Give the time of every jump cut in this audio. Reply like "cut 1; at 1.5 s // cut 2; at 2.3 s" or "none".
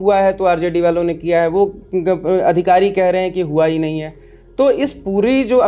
none